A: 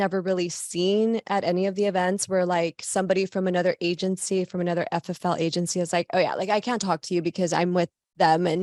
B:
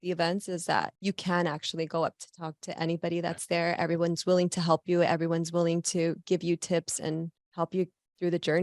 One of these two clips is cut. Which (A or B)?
B